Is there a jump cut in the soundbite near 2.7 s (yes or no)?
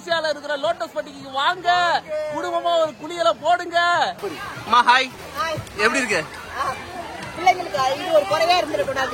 no